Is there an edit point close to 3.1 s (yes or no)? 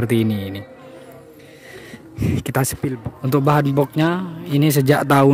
yes